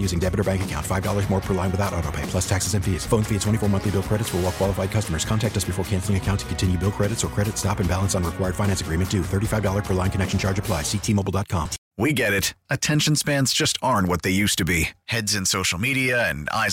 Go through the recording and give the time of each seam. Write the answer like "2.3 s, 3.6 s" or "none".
11.8 s